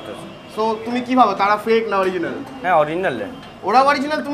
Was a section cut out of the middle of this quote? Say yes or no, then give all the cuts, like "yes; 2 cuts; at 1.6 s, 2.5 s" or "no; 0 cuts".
no; 0 cuts